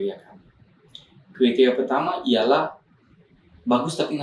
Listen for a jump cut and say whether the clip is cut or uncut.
uncut